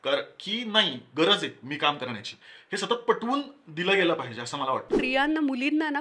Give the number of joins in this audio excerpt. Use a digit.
1